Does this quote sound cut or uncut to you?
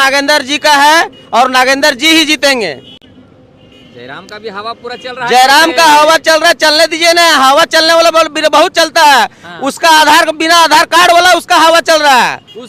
uncut